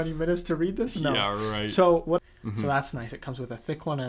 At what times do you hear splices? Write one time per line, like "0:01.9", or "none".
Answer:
0:02.2